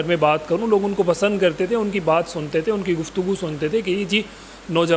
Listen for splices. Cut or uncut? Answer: uncut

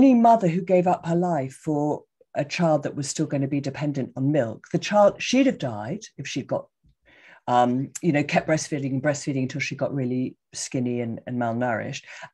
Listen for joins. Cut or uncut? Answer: uncut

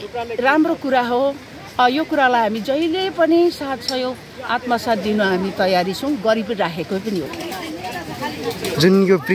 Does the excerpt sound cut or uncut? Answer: cut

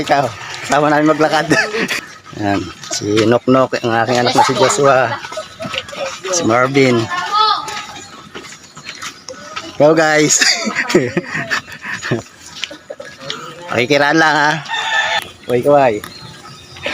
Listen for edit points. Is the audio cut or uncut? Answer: cut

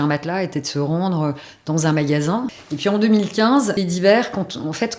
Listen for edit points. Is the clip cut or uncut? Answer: cut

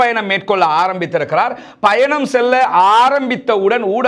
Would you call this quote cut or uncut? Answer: uncut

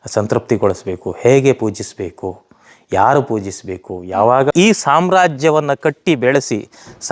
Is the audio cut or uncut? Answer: cut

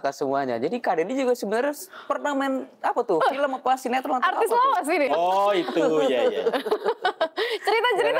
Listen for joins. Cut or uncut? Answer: cut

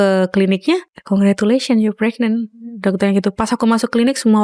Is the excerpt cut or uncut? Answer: cut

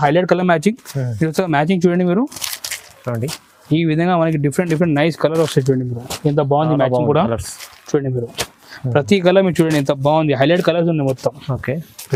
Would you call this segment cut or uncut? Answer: uncut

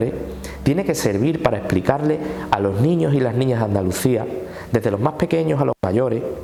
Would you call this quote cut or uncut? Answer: uncut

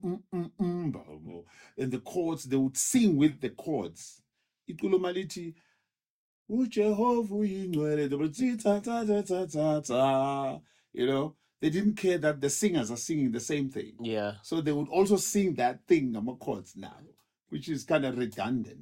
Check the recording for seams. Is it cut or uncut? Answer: uncut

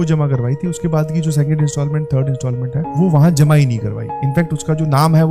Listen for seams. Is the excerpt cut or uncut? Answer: uncut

